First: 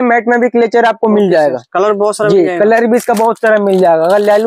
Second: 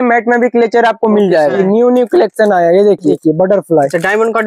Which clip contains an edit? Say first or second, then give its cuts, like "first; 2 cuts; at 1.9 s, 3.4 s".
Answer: second; 2 cuts; at 1.6 s, 3.2 s